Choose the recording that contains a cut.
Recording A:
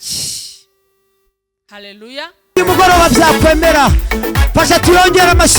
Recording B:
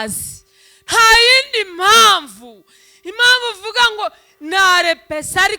A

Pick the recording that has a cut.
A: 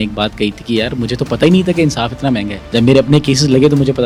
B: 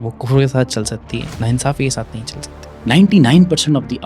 B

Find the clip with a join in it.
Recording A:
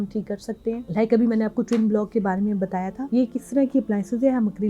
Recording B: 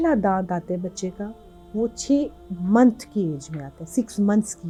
A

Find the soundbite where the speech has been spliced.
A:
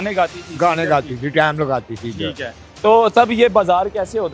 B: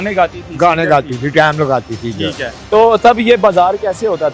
B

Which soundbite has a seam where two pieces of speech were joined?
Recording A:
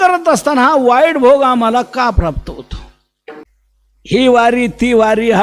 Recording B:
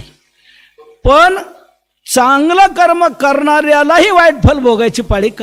A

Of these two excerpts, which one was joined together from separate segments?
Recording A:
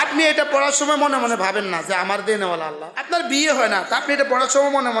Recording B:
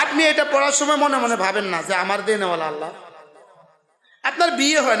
A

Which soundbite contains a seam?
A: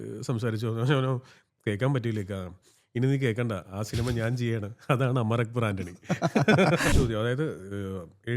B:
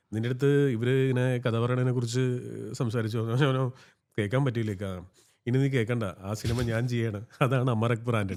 A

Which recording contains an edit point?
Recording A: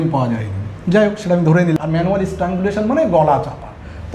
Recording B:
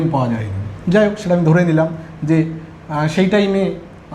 A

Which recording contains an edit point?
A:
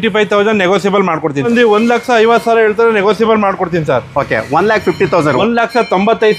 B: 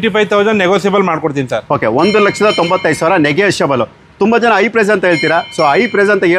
A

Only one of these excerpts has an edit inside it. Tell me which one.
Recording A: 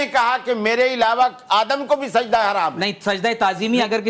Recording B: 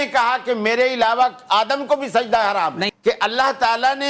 B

